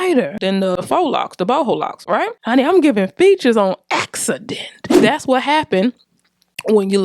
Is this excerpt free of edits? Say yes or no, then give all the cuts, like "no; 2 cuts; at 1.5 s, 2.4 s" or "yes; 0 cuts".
no; 2 cuts; at 0.8 s, 2.4 s